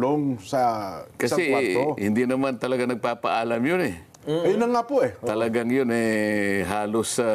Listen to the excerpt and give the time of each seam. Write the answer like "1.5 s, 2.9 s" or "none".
none